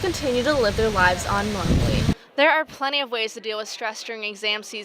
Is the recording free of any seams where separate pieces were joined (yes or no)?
no